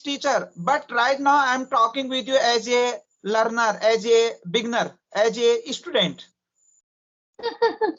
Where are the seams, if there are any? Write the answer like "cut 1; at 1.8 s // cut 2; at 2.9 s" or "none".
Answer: none

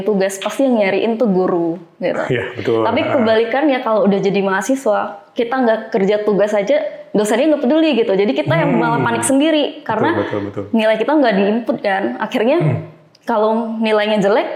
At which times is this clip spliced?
none

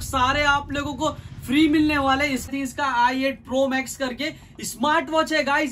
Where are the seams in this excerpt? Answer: cut 1; at 2.5 s

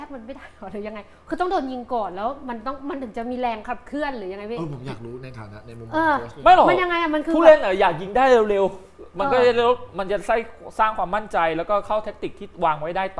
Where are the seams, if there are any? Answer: none

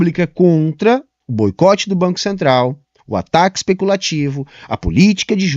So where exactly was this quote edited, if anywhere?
cut 1; at 1.2 s

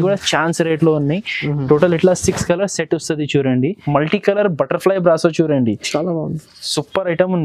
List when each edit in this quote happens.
cut 1; at 3.8 s

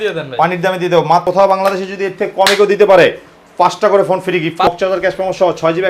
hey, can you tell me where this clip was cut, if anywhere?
cut 1; at 1.3 s // cut 2; at 4.7 s

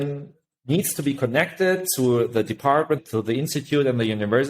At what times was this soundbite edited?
cut 1; at 3.0 s

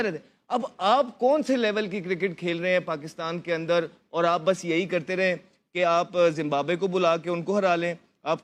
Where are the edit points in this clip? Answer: none

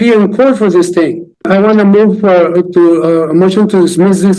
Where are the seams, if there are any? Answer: cut 1; at 1.5 s

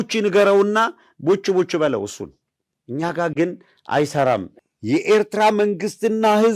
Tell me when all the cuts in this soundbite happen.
cut 1; at 4.5 s

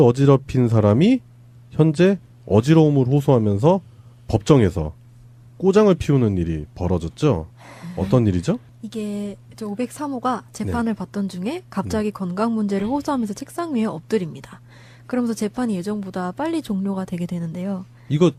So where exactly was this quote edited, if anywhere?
none

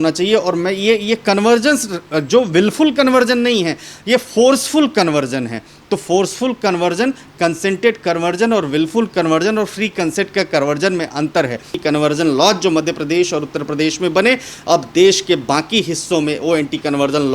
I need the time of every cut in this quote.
cut 1; at 11.7 s

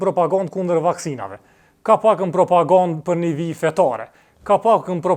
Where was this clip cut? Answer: none

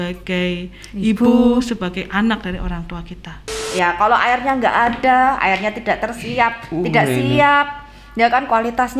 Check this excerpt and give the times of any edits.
cut 1; at 3.6 s

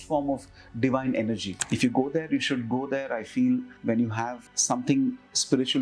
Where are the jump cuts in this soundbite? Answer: cut 1; at 1.5 s // cut 2; at 3.7 s // cut 3; at 4.5 s

